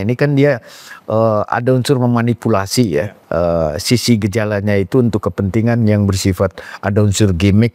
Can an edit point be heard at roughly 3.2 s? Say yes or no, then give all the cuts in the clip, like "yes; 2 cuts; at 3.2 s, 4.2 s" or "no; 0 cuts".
no; 0 cuts